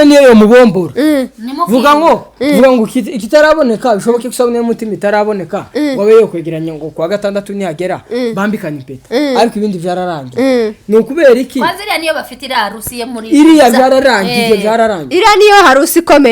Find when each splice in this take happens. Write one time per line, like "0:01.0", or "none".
none